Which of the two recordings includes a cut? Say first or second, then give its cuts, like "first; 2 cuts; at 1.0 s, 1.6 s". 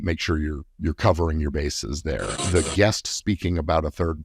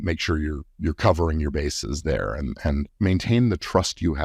first; 1 cut; at 2.3 s